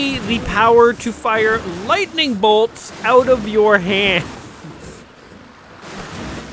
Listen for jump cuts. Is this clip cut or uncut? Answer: uncut